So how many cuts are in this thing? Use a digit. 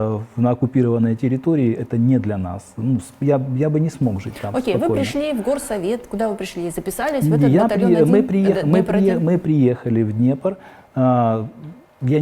0